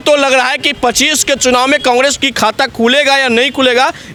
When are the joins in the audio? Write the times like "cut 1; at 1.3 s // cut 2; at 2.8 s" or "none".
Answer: none